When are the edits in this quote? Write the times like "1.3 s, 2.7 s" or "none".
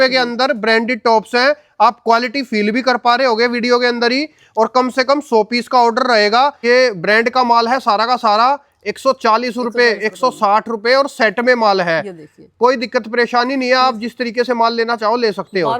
6.6 s